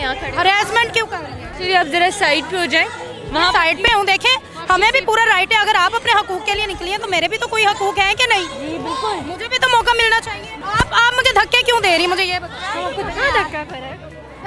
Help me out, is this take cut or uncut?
uncut